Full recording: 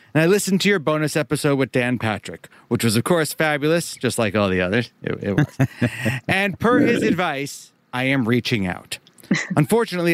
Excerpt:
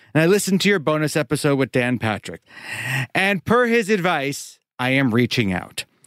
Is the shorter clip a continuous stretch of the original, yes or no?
no